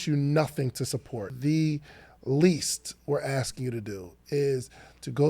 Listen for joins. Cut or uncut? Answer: cut